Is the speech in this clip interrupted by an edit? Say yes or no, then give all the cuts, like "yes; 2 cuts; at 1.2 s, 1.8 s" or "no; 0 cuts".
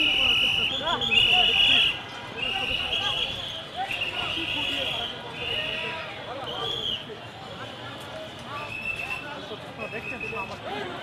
no; 0 cuts